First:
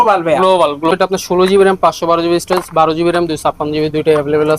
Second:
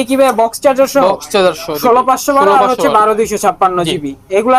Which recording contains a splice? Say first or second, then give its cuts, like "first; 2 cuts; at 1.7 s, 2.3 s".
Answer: first; 1 cut; at 0.9 s